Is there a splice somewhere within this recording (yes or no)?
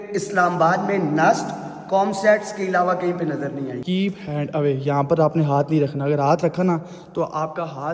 yes